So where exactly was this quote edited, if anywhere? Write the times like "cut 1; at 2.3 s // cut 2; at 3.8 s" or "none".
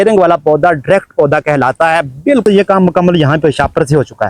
cut 1; at 2.4 s